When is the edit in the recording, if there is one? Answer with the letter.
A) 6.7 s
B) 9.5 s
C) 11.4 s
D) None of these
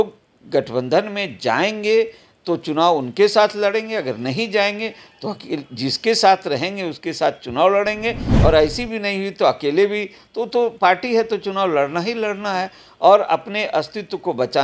D